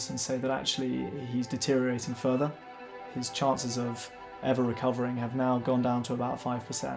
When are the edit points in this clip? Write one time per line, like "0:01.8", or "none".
0:02.9